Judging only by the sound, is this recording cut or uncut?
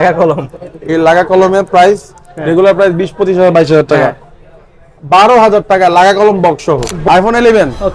cut